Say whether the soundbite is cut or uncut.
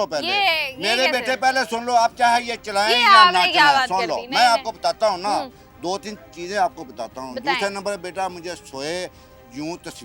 uncut